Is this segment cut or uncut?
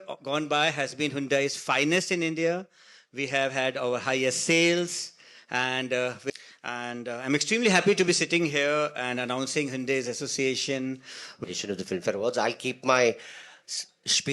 cut